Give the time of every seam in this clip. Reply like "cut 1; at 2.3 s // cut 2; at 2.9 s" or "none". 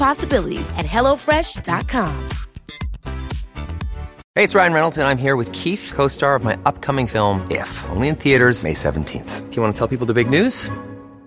cut 1; at 4.2 s